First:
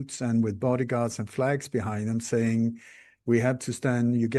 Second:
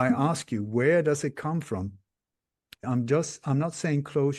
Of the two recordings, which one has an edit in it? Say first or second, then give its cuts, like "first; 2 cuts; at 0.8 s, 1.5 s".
second; 1 cut; at 2.9 s